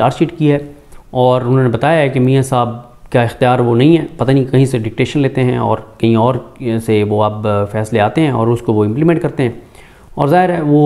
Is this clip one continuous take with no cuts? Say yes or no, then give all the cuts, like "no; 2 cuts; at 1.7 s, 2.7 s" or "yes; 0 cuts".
yes; 0 cuts